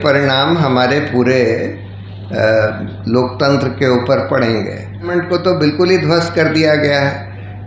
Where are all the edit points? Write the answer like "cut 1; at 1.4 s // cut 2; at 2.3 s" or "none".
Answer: cut 1; at 5.1 s

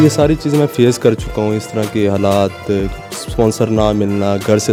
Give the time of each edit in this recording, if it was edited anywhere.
none

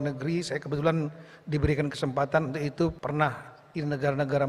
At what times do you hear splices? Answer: cut 1; at 3.0 s

